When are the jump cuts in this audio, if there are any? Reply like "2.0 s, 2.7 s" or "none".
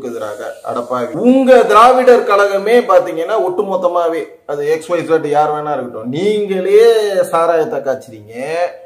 1.1 s